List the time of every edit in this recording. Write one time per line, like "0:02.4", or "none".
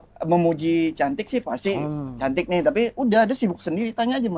none